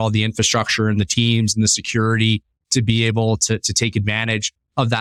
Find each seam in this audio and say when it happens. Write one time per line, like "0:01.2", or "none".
none